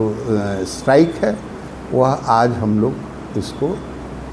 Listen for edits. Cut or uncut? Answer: uncut